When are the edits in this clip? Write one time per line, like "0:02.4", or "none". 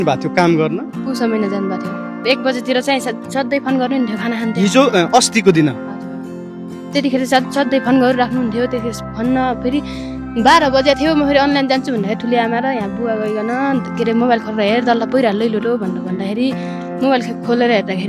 0:02.2